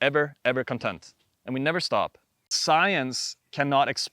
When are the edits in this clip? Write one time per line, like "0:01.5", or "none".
0:02.6